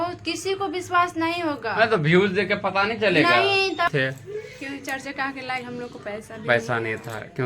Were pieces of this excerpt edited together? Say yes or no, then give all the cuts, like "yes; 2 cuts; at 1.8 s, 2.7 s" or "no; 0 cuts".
yes; 1 cut; at 3.9 s